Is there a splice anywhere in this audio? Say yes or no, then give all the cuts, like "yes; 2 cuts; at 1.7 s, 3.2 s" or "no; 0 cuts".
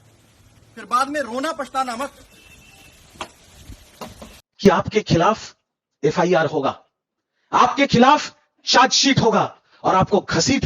yes; 1 cut; at 4.2 s